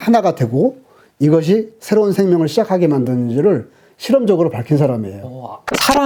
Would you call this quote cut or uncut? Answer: uncut